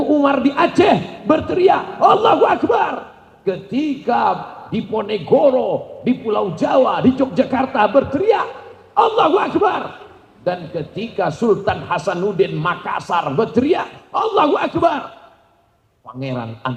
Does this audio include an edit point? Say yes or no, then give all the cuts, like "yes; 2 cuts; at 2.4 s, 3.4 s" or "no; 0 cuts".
no; 0 cuts